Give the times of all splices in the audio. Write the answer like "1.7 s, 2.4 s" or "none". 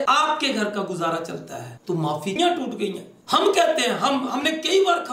2.3 s